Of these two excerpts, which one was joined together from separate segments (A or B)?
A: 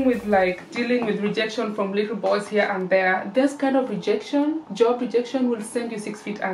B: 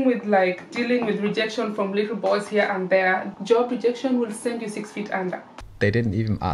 B